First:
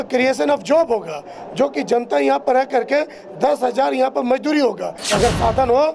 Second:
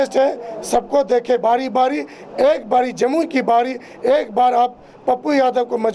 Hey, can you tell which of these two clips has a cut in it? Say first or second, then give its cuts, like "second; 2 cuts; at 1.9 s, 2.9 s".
first; 1 cut; at 5.0 s